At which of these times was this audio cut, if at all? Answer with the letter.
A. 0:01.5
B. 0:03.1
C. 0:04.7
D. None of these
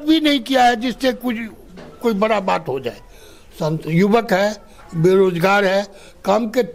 D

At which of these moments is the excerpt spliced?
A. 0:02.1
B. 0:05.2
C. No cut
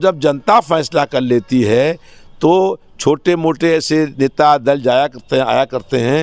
C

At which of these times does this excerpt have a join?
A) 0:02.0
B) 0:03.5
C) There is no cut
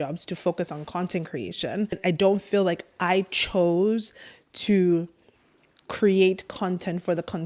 A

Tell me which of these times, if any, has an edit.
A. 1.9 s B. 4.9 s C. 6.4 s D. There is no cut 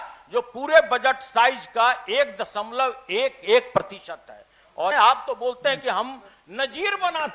B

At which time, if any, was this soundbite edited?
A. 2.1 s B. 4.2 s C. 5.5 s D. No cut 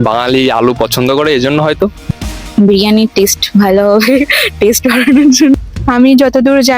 C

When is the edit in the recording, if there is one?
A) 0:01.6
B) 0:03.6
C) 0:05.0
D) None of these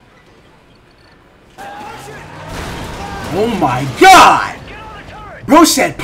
A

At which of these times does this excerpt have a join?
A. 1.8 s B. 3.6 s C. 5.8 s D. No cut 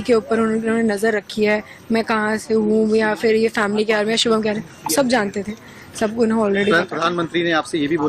D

